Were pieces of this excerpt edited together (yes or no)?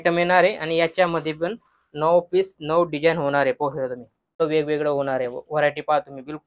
yes